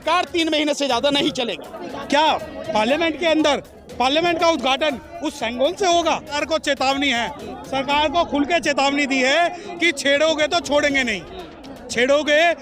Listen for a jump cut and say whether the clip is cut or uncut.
cut